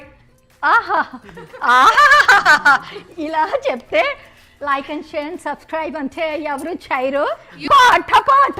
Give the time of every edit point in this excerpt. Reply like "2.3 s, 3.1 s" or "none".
7.7 s